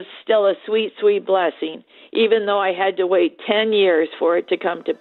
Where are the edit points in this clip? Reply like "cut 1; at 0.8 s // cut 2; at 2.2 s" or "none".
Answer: none